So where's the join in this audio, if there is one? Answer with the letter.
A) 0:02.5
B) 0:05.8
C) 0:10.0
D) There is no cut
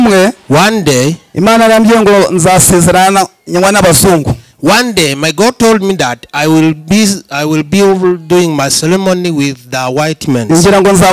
D